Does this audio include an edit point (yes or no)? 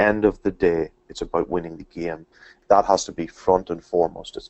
yes